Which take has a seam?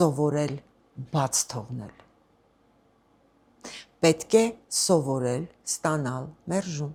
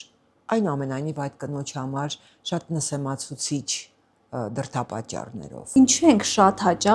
second; 1 cut; at 5.7 s

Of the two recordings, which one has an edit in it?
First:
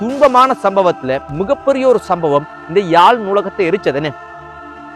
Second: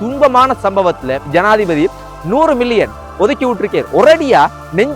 second; 1 cut; at 1.2 s

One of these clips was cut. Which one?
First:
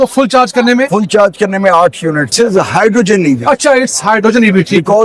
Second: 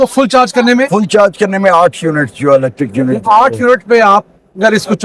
first; 1 cut; at 2.3 s

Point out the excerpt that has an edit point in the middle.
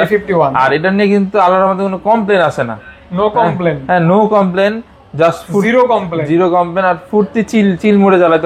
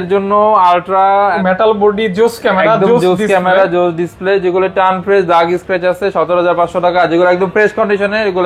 second; 1 cut; at 1.4 s

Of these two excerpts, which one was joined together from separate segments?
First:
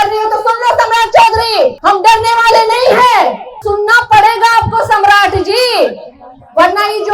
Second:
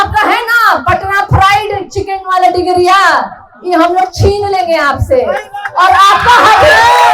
first; 2 cuts; at 1.8 s, 3.5 s

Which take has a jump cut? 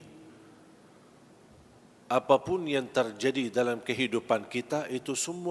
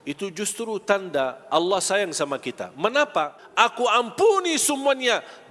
second; 1 cut; at 3.4 s

